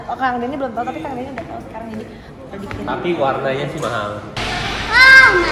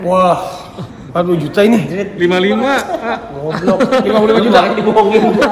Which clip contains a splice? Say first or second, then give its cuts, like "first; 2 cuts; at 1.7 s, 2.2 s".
first; 1 cut; at 4.3 s